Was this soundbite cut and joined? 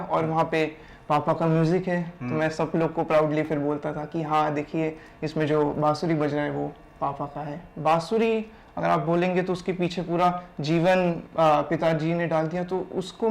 yes; 1 cut; at 7.6 s

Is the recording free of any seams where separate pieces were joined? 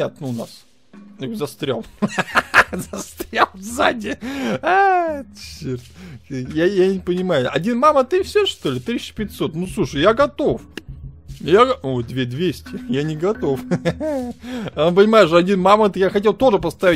yes; 0 cuts

